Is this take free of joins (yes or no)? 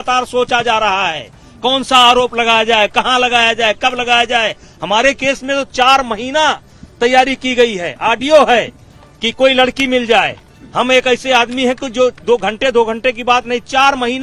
yes